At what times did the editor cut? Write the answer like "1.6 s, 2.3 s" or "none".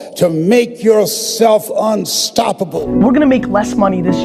2.7 s